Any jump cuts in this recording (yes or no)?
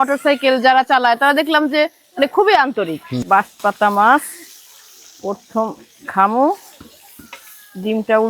yes